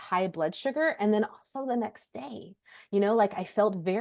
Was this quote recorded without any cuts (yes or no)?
yes